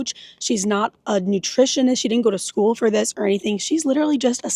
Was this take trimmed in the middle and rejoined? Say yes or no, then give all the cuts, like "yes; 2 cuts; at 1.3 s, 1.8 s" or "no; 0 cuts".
no; 0 cuts